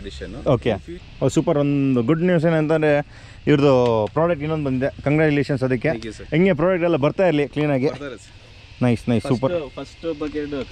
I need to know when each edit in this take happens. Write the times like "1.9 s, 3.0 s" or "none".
0.9 s